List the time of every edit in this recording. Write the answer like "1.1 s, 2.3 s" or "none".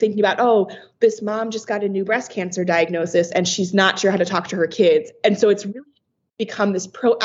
none